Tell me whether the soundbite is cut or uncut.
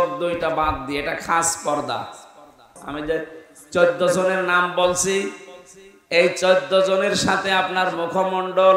cut